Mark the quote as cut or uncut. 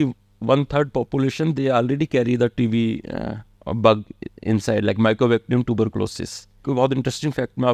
cut